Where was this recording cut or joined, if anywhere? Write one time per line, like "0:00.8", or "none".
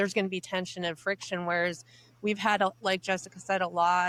none